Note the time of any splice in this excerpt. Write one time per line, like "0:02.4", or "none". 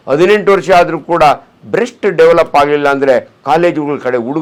none